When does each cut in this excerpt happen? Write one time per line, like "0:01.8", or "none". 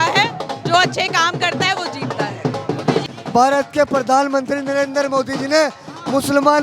0:03.1